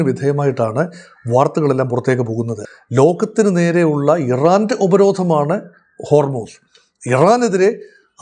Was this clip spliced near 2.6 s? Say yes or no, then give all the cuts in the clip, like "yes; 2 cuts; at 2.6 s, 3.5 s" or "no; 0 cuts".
yes; 1 cut; at 2.6 s